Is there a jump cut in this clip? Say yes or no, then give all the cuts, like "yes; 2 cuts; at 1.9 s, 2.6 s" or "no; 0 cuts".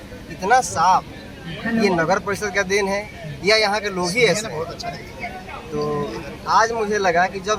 no; 0 cuts